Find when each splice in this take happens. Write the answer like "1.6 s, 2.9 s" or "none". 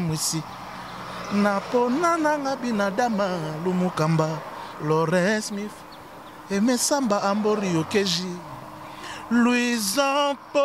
none